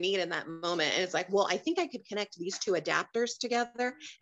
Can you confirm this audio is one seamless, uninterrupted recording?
yes; 0 cuts

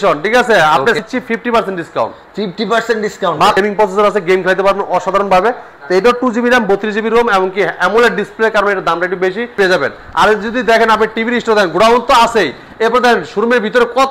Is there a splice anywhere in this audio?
yes; 3 cuts; at 1.0 s, 3.6 s, 9.5 s

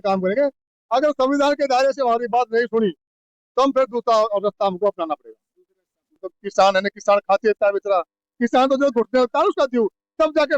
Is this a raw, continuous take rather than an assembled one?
no; 1 cut; at 6.2 s

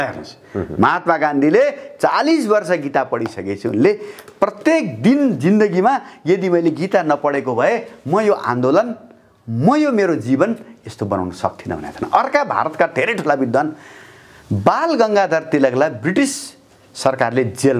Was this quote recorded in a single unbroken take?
yes; 0 cuts

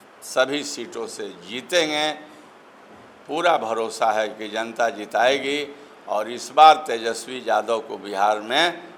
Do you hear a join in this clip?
no; 0 cuts

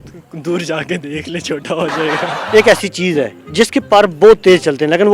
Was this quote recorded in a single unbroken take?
no; 1 cut; at 2.3 s

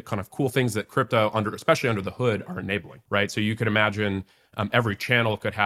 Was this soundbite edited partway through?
yes; 1 cut; at 2.9 s

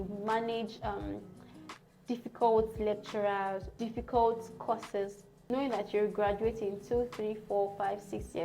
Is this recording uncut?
no; 2 cuts; at 3.7 s, 5.3 s

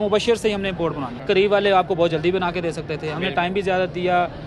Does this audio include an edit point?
yes; 1 cut; at 1.1 s

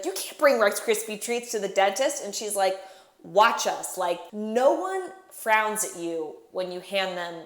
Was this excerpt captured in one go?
no; 1 cut; at 4.3 s

